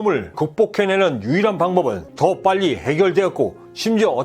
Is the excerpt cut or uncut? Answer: cut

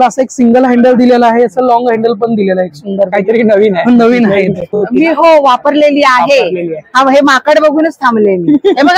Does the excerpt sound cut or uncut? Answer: cut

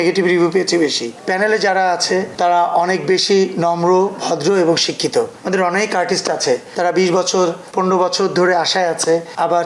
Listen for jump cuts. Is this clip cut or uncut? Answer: cut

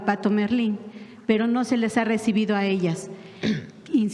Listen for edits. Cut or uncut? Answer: uncut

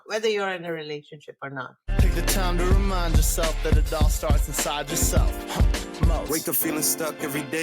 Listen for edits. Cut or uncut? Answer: cut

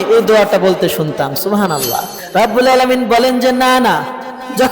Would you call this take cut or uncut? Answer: cut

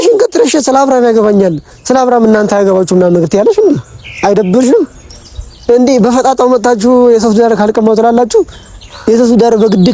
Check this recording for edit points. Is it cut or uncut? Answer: uncut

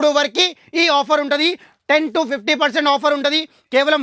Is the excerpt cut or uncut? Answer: uncut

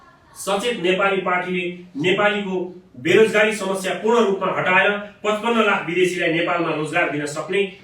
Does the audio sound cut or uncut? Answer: uncut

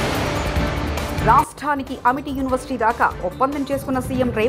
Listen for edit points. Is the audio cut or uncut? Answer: uncut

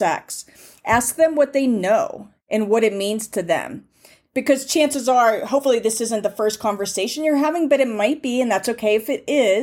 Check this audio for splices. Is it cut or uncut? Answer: uncut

